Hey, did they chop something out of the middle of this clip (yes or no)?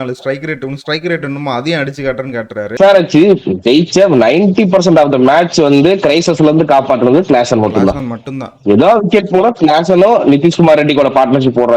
yes